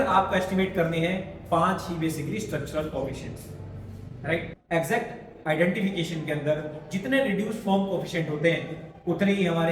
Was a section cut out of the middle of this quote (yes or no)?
yes